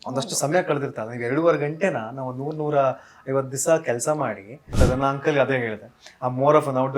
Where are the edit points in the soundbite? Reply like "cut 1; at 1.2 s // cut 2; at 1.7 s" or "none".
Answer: cut 1; at 4.8 s